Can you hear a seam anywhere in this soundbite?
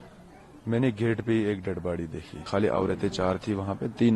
yes; 1 cut; at 2.4 s

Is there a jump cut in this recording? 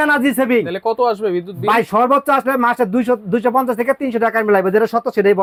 no; 0 cuts

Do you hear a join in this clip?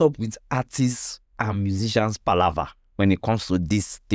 no; 0 cuts

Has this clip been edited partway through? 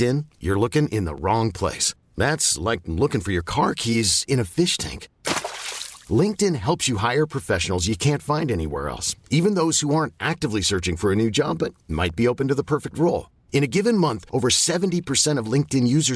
no; 0 cuts

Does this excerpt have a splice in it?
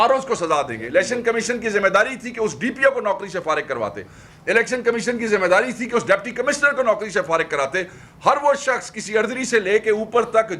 no; 0 cuts

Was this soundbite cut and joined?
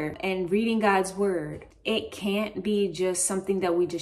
yes; 1 cut; at 1.6 s

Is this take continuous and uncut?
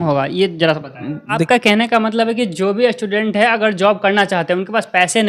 no; 1 cut; at 1.4 s

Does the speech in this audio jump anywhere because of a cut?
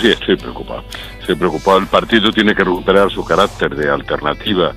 no; 0 cuts

